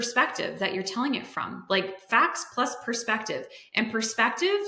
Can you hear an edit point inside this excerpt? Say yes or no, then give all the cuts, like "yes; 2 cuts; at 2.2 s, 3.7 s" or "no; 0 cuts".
no; 0 cuts